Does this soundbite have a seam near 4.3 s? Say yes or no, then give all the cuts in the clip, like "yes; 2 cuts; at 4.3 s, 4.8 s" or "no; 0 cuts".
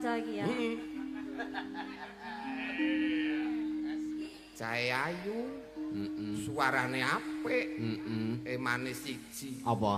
yes; 1 cut; at 4.3 s